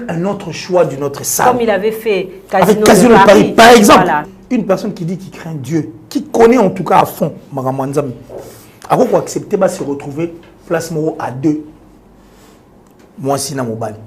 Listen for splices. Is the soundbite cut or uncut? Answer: cut